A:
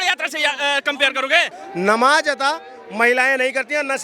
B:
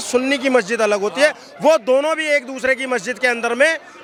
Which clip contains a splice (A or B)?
A